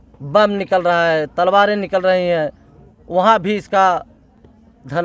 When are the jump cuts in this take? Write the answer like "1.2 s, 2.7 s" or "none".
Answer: none